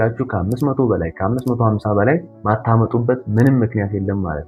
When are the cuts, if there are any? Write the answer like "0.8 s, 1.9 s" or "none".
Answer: 2.3 s